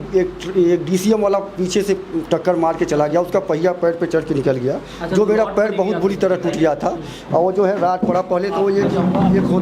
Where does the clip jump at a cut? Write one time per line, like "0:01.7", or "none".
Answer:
none